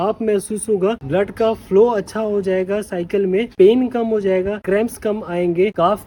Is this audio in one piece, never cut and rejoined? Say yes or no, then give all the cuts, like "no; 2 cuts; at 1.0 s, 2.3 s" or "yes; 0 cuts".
yes; 0 cuts